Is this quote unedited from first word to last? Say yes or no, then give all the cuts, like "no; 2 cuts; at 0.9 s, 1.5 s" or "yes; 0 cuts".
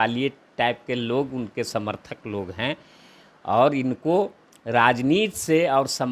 yes; 0 cuts